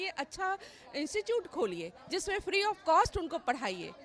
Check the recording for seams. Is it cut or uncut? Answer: uncut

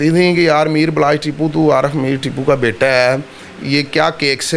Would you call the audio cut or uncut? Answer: uncut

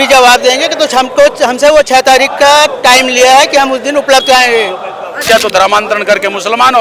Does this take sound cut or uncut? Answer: cut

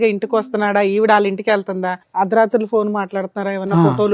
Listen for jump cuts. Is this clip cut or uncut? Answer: cut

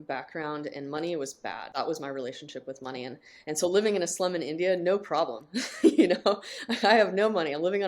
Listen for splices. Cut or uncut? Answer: cut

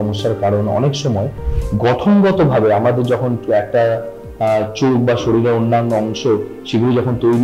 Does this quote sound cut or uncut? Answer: uncut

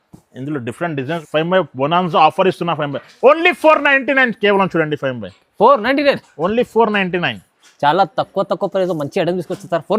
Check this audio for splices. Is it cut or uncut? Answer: cut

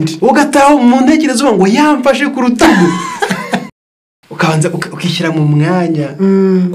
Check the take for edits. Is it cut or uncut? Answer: cut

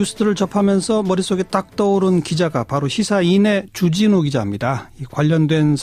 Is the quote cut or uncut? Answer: uncut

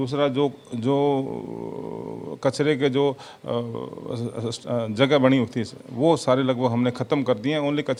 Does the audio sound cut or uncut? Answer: uncut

